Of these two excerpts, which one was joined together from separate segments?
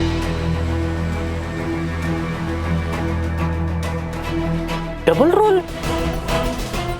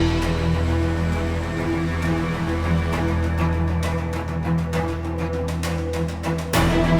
first; 2 cuts; at 4.3 s, 5.8 s

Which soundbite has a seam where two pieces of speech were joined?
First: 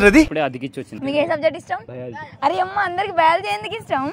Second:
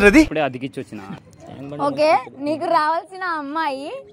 second; 1 cut; at 1.0 s

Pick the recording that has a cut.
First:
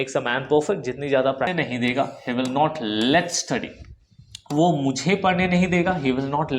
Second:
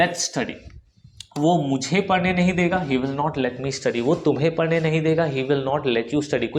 first; 1 cut; at 1.5 s

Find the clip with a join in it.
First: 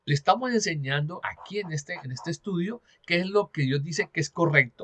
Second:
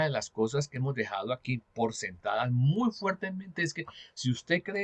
first; 1 cut; at 1.2 s

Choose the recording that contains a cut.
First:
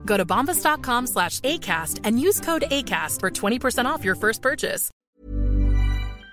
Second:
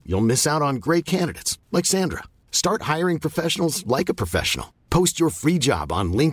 first; 1 cut; at 4.9 s

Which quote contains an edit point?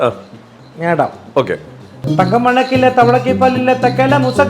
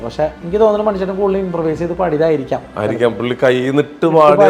first; 1 cut; at 2.0 s

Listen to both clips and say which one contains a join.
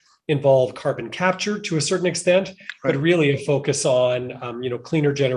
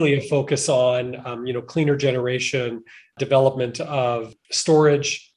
second; 2 cuts; at 3.1 s, 4.3 s

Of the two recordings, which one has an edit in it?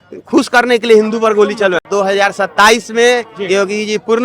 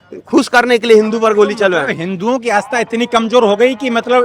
first; 1 cut; at 1.8 s

